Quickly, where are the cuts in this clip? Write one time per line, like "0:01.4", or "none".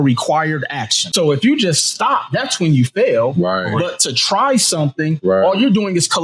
0:01.1